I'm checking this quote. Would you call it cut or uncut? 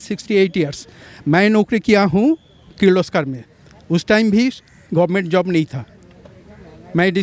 uncut